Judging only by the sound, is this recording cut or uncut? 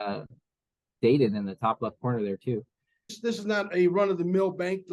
cut